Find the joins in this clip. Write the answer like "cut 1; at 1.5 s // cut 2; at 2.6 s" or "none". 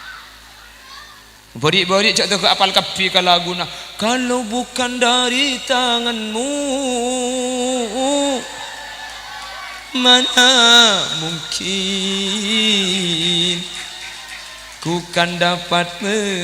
cut 1; at 1.4 s